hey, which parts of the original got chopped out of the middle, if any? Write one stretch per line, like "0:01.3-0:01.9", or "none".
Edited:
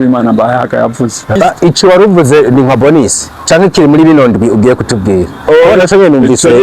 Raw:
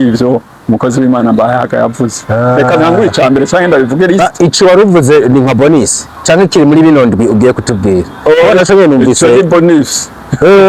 0:02.4-0:04.1